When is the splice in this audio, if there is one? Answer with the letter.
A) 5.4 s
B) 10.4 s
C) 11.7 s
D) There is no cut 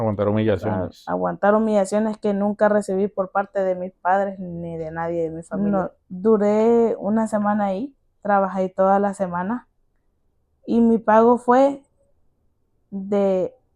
A